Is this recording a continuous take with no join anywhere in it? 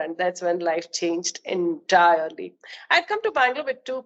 yes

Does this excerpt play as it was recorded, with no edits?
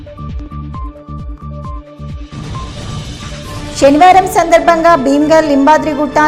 no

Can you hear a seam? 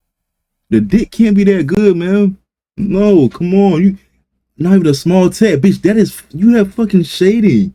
no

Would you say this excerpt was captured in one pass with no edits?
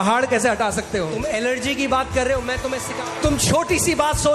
no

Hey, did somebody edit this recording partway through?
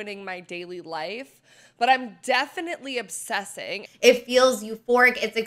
yes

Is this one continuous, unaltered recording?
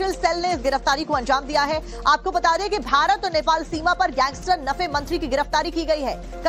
yes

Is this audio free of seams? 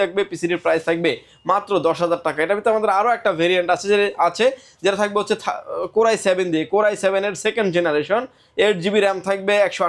yes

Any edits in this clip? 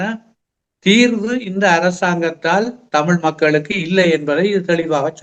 no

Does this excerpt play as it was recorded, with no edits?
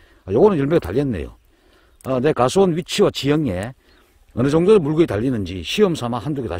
yes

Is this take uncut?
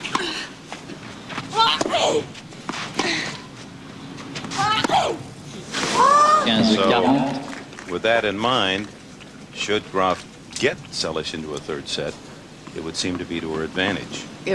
no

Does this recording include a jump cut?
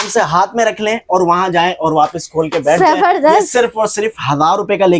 no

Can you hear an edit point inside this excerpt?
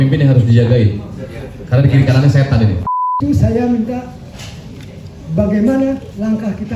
yes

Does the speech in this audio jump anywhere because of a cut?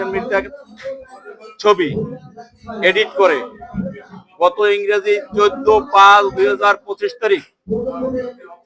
no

